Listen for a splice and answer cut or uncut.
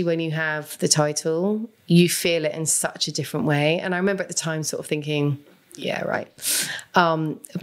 uncut